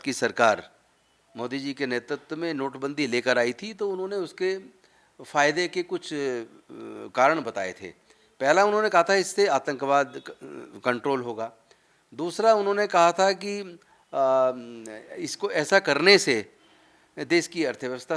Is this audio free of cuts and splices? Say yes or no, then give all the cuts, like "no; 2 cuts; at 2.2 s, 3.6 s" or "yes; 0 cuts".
yes; 0 cuts